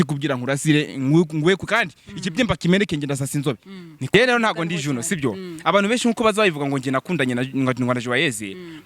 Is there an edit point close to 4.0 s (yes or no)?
yes